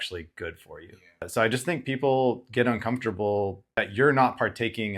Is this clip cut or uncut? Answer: cut